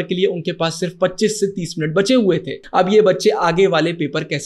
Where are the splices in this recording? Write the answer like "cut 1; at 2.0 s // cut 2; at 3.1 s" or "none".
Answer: cut 1; at 2.6 s

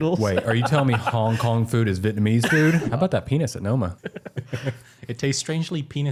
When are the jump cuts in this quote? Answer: cut 1; at 2.8 s // cut 2; at 4.1 s

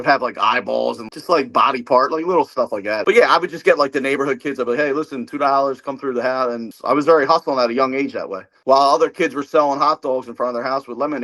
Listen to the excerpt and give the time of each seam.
cut 1; at 1.1 s // cut 2; at 6.7 s

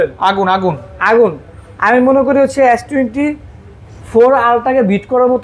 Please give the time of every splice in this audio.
none

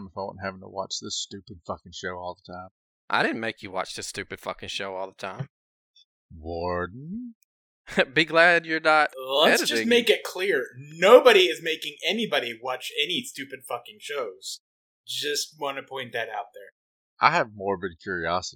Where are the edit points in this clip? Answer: none

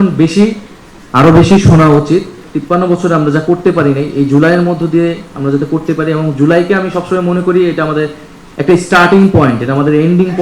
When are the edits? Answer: cut 1; at 2.5 s

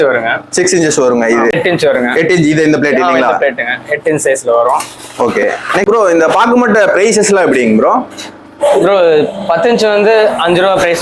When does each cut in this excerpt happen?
cut 1; at 1.6 s // cut 2; at 5.8 s

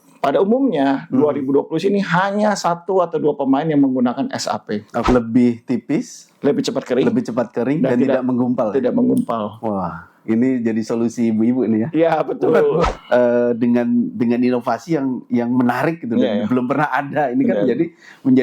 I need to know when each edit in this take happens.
cut 1; at 4.9 s // cut 2; at 12.9 s

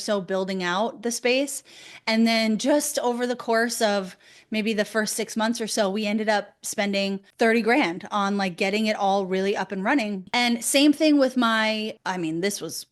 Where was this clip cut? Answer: cut 1; at 10.3 s

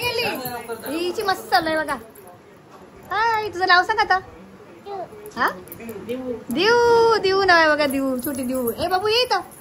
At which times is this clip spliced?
none

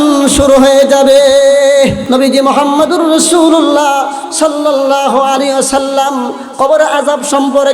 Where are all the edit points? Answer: cut 1; at 2.0 s

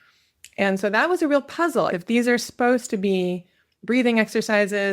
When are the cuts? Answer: cut 1; at 1.9 s

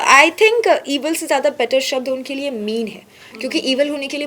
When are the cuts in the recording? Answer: none

